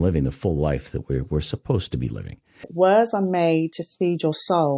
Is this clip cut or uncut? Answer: cut